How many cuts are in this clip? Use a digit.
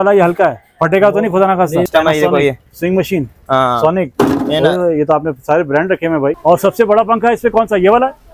2